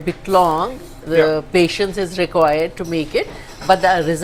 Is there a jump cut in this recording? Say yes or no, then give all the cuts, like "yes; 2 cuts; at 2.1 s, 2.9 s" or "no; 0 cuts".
no; 0 cuts